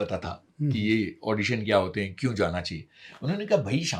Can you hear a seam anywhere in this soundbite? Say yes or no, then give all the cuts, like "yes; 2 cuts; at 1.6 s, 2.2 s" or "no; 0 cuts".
no; 0 cuts